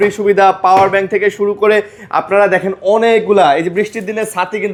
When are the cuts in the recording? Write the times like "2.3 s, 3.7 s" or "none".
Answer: none